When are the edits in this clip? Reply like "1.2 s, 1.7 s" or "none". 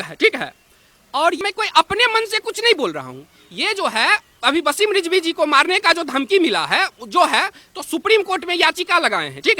1.4 s

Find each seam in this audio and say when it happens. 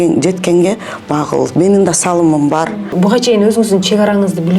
2.8 s

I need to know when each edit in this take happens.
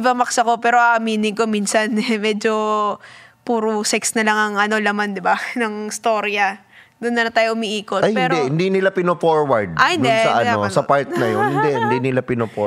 none

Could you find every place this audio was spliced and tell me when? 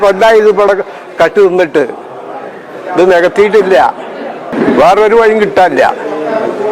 4.5 s

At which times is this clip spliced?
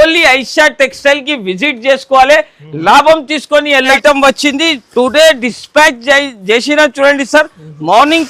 3.9 s

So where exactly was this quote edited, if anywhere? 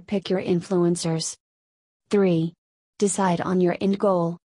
1.0 s

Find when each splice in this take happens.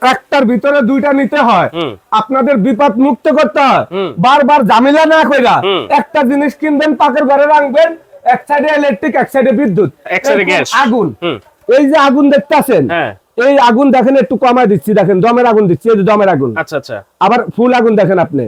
none

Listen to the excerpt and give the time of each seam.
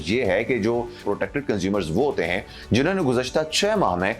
1.0 s

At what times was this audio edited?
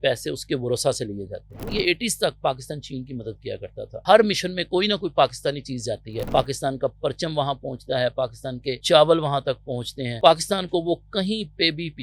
1.5 s, 4.0 s, 6.1 s, 8.8 s, 10.2 s

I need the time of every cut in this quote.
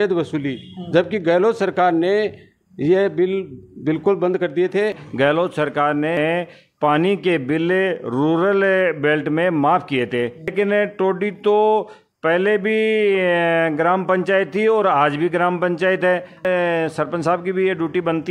5.0 s, 10.5 s, 16.4 s

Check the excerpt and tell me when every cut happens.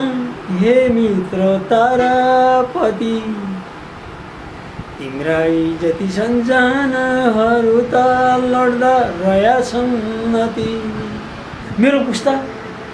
11.6 s

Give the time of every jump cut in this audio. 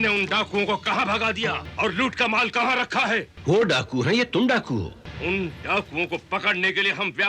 1.6 s, 3.3 s, 5.0 s

